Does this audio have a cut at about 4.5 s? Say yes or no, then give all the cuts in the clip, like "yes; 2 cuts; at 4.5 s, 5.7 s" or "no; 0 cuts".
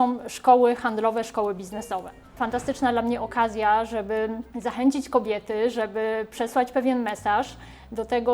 yes; 2 cuts; at 2.3 s, 4.5 s